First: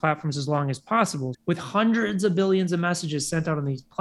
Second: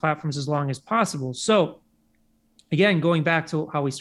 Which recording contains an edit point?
first; 1 cut; at 1.3 s

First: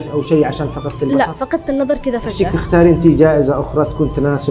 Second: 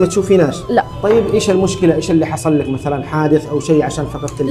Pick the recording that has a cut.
first; 1 cut; at 2.3 s

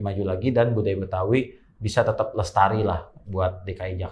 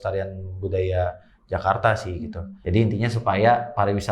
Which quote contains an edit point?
second; 1 cut; at 2.6 s

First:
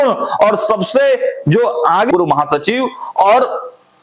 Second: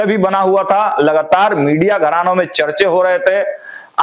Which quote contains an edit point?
first; 1 cut; at 2.1 s

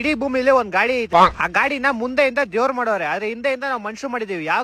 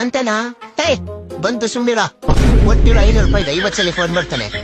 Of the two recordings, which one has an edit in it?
first; 1 cut; at 1.0 s

